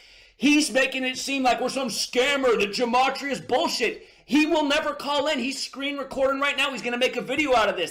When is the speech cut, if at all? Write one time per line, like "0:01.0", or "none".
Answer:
none